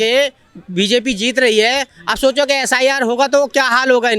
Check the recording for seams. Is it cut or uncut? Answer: uncut